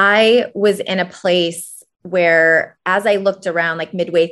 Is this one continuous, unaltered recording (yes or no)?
yes